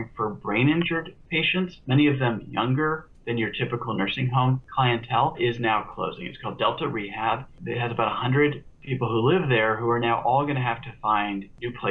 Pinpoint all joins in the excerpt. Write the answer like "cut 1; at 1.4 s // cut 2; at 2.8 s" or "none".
none

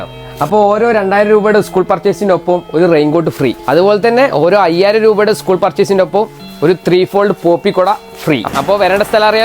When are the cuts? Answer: cut 1; at 8.5 s

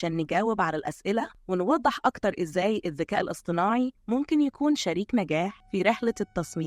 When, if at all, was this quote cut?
cut 1; at 1.4 s // cut 2; at 4.0 s // cut 3; at 5.6 s

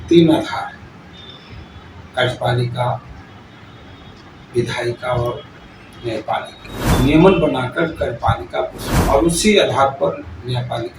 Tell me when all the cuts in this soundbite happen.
cut 1; at 6.7 s // cut 2; at 8.9 s

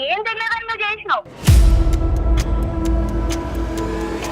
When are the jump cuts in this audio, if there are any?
cut 1; at 1.3 s

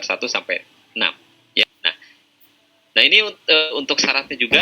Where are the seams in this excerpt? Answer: cut 1; at 1.6 s

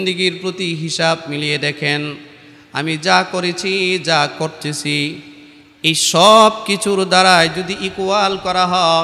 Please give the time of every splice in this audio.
none

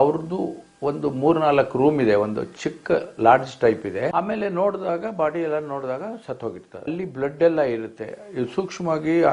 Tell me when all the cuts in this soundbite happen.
cut 1; at 4.1 s

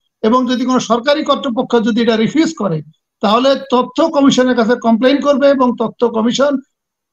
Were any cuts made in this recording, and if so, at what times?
none

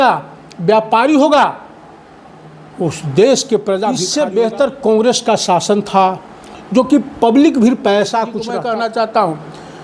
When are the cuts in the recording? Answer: cut 1; at 4.1 s // cut 2; at 8.5 s

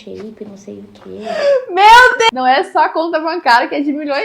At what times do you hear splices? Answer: cut 1; at 2.3 s

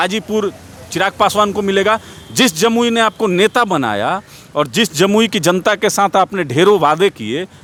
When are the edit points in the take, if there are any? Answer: none

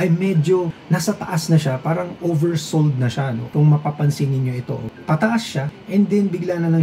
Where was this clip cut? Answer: cut 1; at 3.4 s

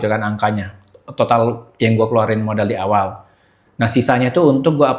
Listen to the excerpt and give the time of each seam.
none

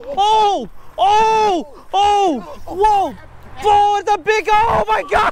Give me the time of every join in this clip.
none

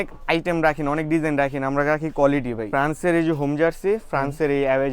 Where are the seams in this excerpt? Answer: cut 1; at 2.6 s

